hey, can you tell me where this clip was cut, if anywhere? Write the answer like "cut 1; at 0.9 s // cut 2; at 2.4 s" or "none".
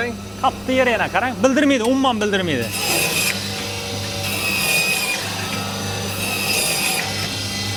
none